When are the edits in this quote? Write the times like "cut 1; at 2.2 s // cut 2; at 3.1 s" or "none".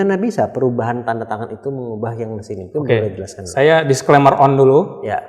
none